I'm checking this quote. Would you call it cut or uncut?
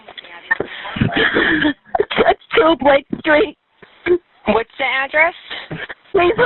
uncut